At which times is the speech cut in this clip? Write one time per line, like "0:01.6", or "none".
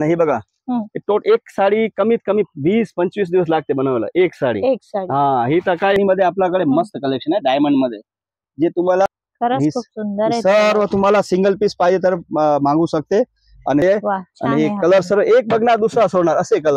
0:06.0
0:09.1
0:13.8